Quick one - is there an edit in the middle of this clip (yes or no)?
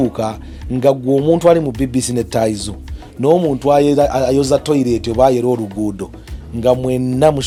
no